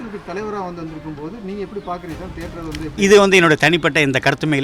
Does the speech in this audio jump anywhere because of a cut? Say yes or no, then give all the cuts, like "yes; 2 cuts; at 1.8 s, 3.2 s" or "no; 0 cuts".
no; 0 cuts